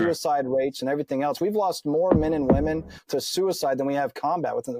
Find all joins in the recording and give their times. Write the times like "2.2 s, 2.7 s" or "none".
none